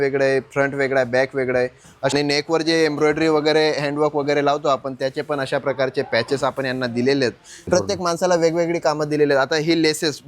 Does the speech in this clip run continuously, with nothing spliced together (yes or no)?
no